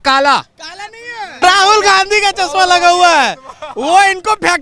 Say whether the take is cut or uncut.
cut